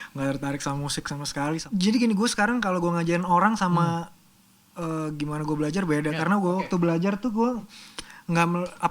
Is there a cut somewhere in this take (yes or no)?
yes